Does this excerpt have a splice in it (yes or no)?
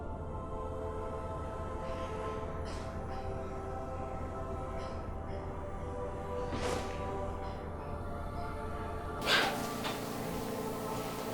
yes